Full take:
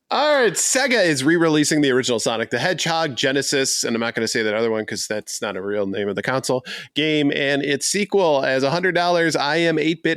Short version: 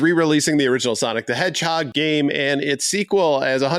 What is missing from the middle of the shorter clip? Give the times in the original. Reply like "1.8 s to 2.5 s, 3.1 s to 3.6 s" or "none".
3.1 s to 6.9 s